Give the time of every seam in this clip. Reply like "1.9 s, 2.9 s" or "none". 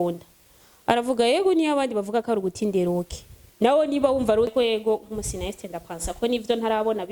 4.5 s

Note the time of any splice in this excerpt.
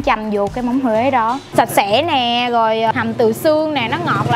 1.4 s, 2.9 s

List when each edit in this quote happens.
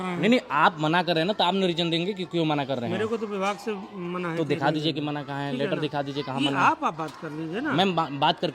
none

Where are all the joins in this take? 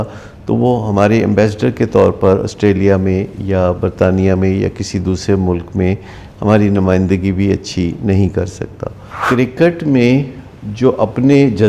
9.2 s

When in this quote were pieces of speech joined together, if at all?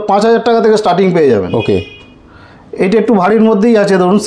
none

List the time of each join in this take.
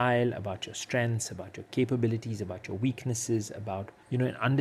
none

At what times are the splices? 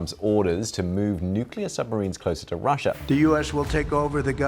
3.0 s

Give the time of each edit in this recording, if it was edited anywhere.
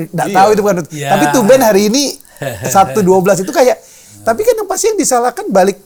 none

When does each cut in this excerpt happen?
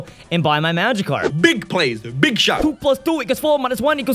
1.3 s, 2.8 s

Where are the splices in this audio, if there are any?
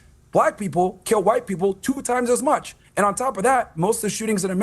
2.8 s

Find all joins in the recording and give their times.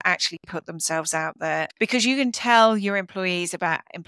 1.7 s

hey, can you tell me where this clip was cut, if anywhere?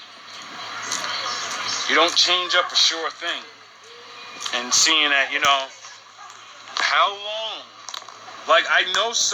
2.2 s

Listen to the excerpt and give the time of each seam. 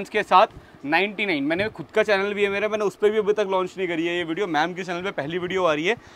none

